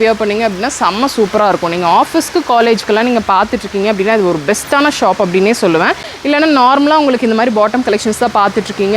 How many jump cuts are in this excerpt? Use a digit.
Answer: 1